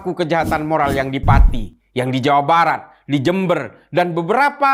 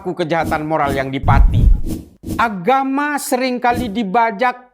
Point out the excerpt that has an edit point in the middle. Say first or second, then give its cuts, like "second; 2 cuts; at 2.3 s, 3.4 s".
second; 1 cut; at 1.8 s